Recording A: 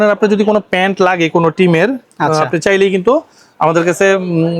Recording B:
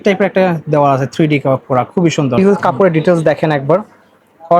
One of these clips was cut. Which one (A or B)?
B